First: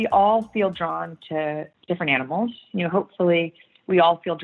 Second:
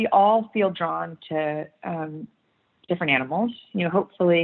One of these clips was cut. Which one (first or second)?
first